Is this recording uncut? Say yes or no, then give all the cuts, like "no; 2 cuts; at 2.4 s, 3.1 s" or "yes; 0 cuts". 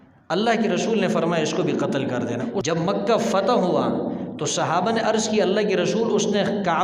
no; 1 cut; at 2.6 s